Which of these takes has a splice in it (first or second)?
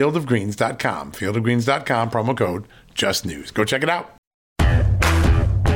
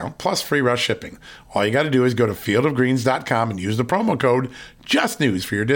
first